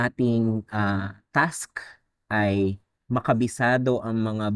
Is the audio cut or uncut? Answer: cut